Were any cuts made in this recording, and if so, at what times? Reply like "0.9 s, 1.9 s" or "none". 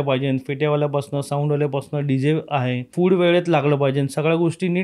2.9 s